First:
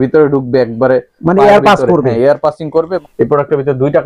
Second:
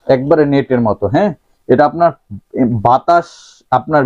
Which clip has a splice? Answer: first; 1 cut; at 3.0 s

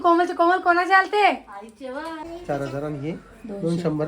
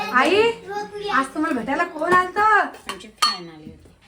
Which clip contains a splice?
first; 1 cut; at 2.2 s

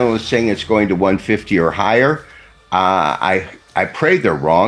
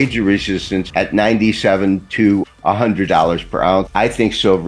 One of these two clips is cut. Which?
second; 3 cuts; at 0.9 s, 2.5 s, 3.9 s

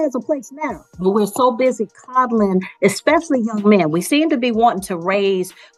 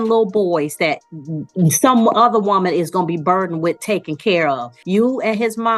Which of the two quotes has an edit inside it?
second; 1 cut; at 4.7 s

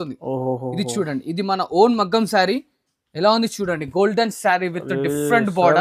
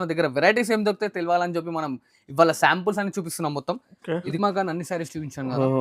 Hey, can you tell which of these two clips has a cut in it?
second; 1 cut; at 4.4 s

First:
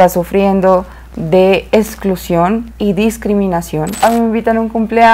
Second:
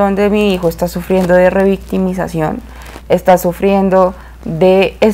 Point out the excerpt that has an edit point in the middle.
first; 1 cut; at 4.0 s

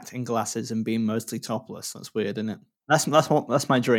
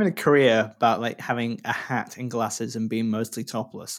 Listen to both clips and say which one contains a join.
first; 1 cut; at 2.9 s

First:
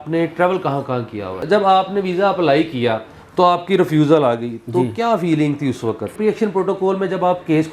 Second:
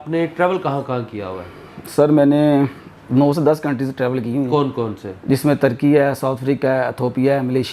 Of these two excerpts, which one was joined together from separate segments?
first; 2 cuts; at 1.4 s, 6.1 s

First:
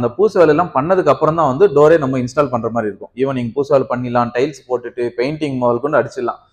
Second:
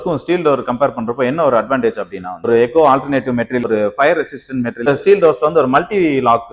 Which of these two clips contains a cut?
second; 3 cuts; at 2.5 s, 3.7 s, 4.9 s

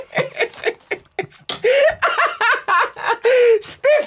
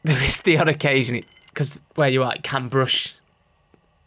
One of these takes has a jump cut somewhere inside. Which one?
second; 1 cut; at 1.4 s

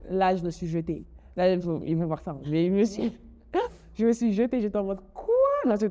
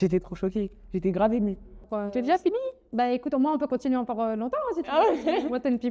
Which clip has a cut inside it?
second; 1 cut; at 1.7 s

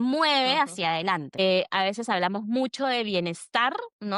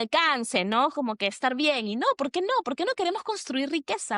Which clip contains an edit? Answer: first; 1 cut; at 1.3 s

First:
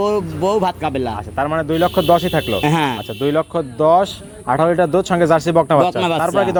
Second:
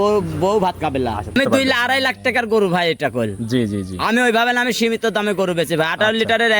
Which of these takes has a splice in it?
second; 1 cut; at 1.3 s

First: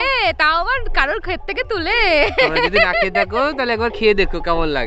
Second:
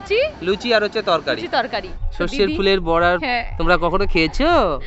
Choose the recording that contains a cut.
second; 1 cut; at 1.9 s

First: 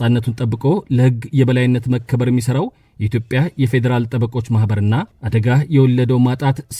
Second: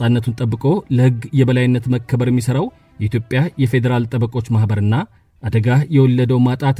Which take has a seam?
first; 1 cut; at 5.2 s

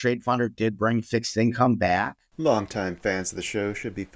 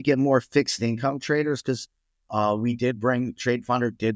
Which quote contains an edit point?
first; 1 cut; at 2.2 s

